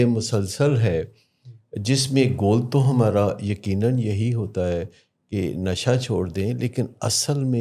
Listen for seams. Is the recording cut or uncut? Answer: uncut